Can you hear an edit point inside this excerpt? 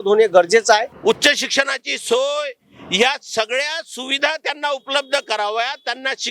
yes; 1 cut; at 0.9 s

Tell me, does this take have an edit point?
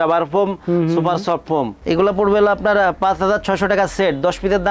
no; 0 cuts

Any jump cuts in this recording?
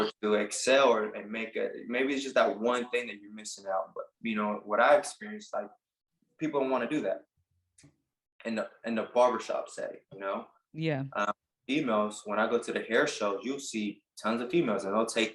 no; 0 cuts

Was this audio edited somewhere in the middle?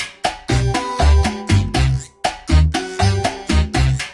no; 0 cuts

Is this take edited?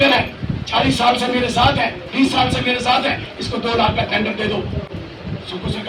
no; 0 cuts

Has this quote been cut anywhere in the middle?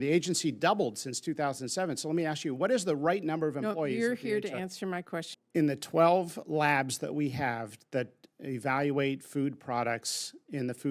yes; 1 cut; at 5.4 s

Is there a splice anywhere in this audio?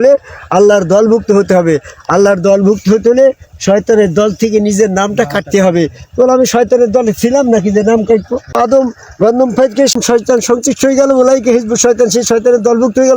yes; 2 cuts; at 8.6 s, 9.9 s

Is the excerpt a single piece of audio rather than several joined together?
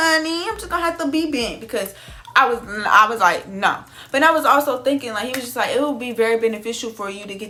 yes; 0 cuts

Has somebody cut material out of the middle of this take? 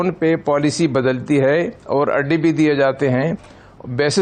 no; 0 cuts

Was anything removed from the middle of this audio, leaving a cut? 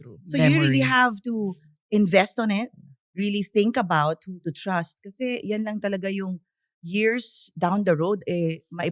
no; 0 cuts

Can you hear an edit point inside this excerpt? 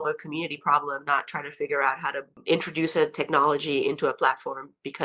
yes; 1 cut; at 2.4 s

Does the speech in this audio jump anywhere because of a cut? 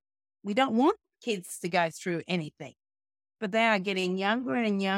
no; 0 cuts

